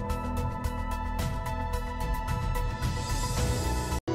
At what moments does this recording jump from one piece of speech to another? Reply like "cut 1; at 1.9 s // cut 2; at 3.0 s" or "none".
cut 1; at 1.0 s